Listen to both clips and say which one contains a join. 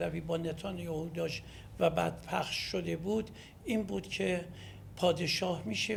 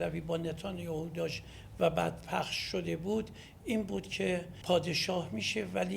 second; 1 cut; at 4.5 s

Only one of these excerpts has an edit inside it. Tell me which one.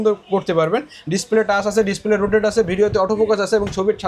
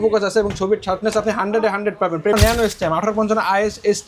second; 1 cut; at 2.3 s

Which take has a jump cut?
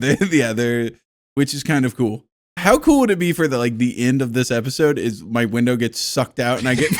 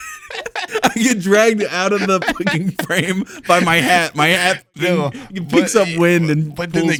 first; 1 cut; at 2.6 s

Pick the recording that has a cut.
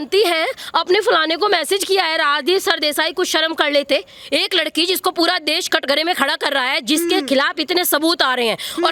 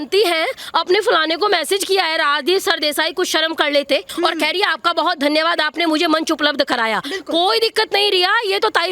second; 1 cut; at 4.1 s

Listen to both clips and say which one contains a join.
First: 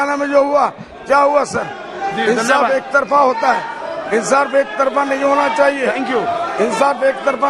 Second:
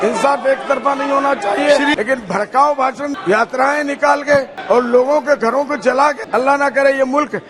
second; 4 cuts; at 1.9 s, 3.2 s, 4.5 s, 6.2 s

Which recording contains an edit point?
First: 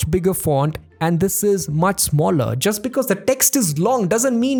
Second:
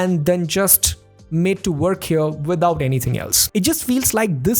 second; 1 cut; at 3.3 s

